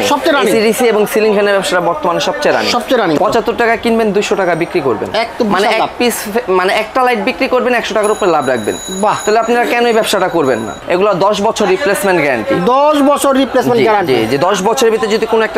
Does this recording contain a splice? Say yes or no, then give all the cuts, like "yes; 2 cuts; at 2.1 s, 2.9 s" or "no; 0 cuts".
yes; 2 cuts; at 3.2 s, 10.7 s